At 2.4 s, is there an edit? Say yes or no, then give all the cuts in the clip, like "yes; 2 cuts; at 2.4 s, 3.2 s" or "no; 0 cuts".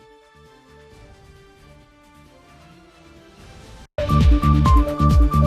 no; 1 cut; at 3.9 s